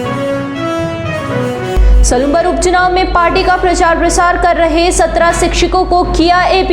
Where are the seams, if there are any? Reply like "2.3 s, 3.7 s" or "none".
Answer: 1.4 s

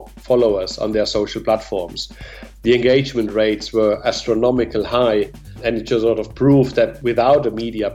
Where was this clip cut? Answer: 5.6 s, 7.0 s

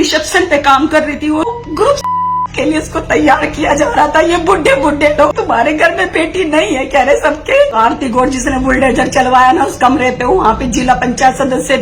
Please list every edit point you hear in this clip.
1.5 s, 5.3 s, 7.8 s

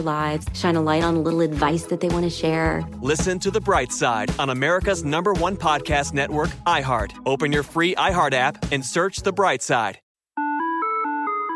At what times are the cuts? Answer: 10.0 s

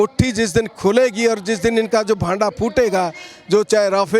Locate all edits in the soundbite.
none

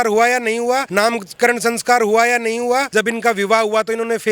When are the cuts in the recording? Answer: 0.9 s, 2.9 s

